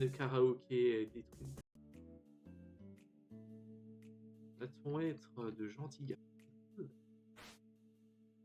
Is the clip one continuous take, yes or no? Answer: yes